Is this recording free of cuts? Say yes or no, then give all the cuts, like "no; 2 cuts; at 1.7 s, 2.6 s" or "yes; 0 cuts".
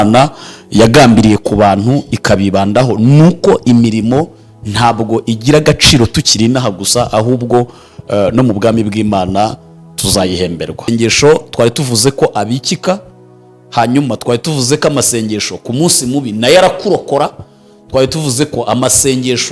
no; 1 cut; at 10.8 s